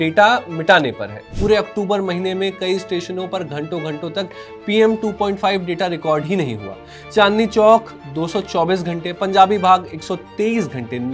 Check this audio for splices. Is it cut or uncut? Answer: cut